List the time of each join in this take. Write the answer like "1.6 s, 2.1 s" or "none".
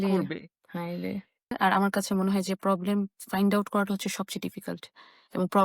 1.4 s